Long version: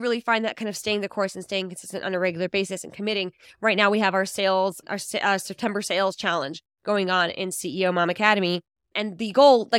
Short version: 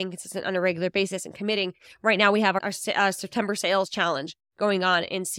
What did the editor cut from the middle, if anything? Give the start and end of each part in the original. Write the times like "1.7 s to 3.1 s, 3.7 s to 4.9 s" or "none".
4.2 s to 4.8 s